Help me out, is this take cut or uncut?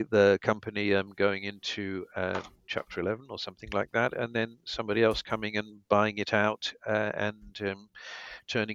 uncut